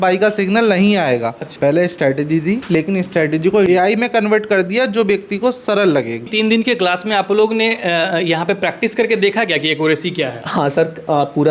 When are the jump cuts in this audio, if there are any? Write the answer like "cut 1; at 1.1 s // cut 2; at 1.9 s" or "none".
cut 1; at 1.5 s // cut 2; at 3.7 s // cut 3; at 6.2 s